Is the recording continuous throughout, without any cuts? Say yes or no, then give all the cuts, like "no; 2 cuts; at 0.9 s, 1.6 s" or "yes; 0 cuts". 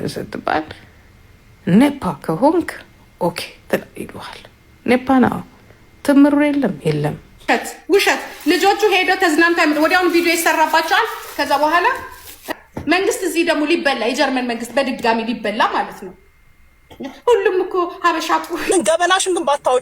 no; 3 cuts; at 7.4 s, 12.4 s, 18.7 s